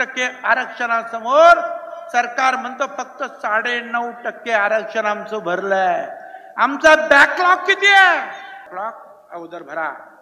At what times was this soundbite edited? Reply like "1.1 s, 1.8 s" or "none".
8.7 s